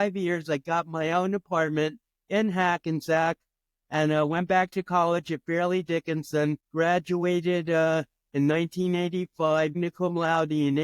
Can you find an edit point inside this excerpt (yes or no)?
yes